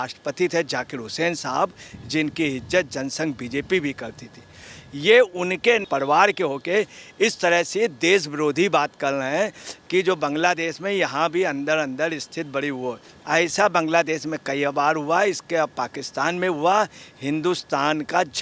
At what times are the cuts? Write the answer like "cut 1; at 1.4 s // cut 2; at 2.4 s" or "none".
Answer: cut 1; at 5.8 s // cut 2; at 13.1 s